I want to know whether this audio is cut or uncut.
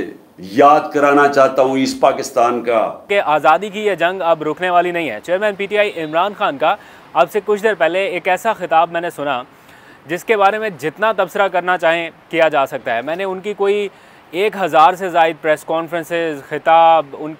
cut